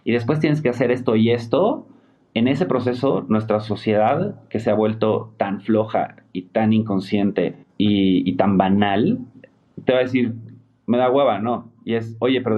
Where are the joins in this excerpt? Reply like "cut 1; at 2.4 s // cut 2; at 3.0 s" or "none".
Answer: cut 1; at 7.6 s